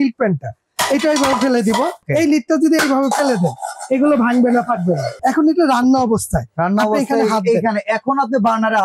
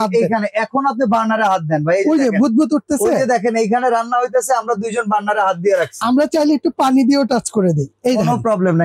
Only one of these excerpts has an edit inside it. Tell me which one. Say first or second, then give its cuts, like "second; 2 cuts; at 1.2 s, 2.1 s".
first; 2 cuts; at 2.0 s, 5.1 s